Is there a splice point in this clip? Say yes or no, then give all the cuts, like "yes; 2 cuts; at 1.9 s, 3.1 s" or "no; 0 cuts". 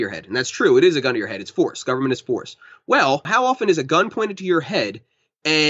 yes; 1 cut; at 3.3 s